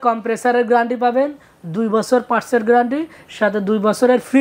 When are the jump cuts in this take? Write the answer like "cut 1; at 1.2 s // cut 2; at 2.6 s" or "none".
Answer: none